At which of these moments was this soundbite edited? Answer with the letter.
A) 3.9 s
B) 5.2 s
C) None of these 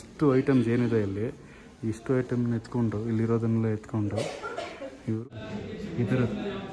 B